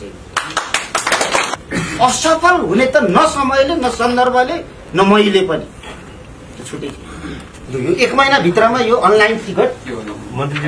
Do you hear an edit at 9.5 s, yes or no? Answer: no